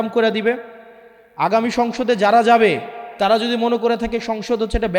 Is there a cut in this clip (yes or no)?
no